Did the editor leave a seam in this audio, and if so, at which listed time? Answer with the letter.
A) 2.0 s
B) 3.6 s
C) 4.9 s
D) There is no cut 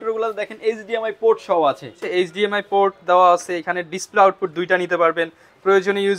A